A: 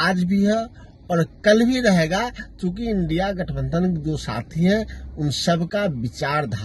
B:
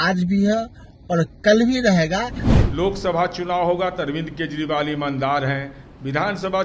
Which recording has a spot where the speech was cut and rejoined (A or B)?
B